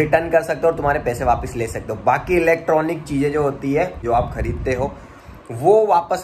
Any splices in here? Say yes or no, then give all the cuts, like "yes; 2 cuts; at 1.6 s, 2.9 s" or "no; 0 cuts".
yes; 1 cut; at 4.0 s